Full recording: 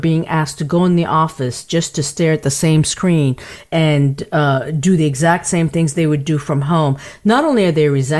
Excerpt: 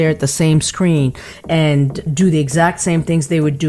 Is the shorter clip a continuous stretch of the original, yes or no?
no